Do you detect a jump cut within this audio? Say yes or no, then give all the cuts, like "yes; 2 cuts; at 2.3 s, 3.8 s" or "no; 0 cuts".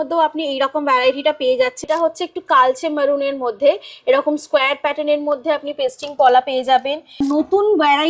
yes; 2 cuts; at 1.8 s, 7.2 s